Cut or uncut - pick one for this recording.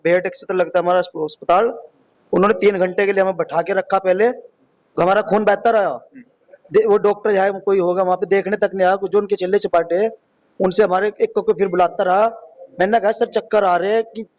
uncut